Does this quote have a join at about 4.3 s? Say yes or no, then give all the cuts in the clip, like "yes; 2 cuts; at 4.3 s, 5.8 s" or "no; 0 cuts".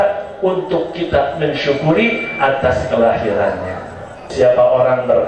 yes; 1 cut; at 4.3 s